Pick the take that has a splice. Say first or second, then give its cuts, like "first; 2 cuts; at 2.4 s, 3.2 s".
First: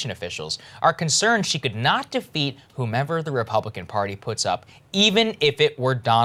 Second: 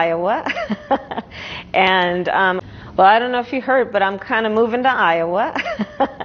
second; 1 cut; at 2.6 s